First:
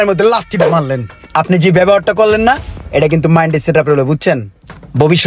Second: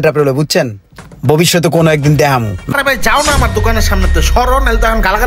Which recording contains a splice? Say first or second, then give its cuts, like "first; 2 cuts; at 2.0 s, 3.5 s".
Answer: second; 1 cut; at 2.7 s